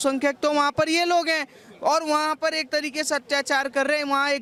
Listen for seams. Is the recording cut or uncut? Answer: uncut